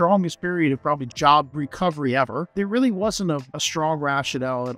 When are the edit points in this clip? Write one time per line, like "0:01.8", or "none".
0:01.1
0:02.4
0:03.6